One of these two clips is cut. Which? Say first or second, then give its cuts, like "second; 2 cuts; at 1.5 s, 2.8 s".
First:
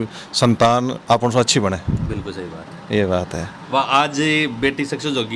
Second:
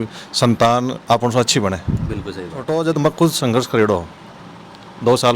second; 1 cut; at 2.7 s